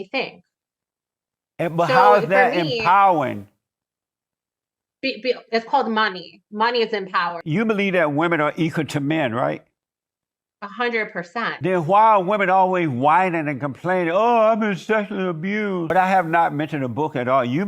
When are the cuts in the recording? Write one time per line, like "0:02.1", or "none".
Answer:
0:07.4
0:15.9